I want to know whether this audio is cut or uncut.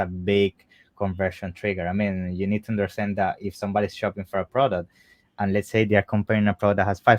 uncut